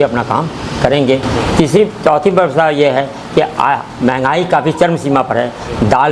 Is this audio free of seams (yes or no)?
yes